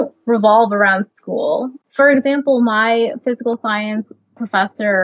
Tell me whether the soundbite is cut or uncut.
cut